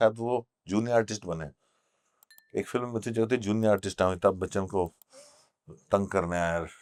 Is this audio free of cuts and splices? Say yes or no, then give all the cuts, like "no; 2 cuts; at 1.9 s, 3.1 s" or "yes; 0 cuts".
yes; 0 cuts